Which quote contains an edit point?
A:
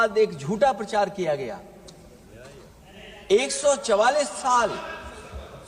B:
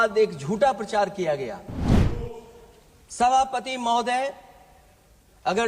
B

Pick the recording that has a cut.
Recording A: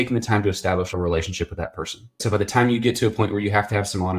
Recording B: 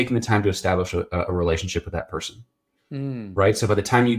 A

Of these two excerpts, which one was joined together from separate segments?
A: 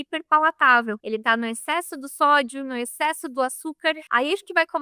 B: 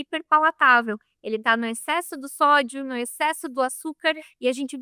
A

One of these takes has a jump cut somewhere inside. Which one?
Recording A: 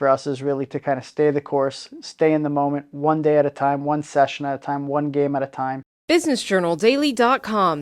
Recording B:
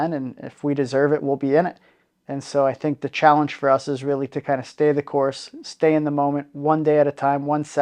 A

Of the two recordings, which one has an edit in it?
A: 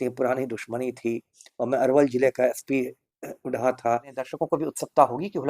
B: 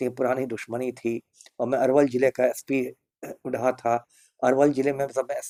A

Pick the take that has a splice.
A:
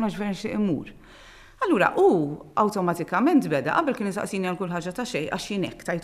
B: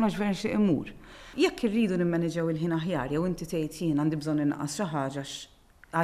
B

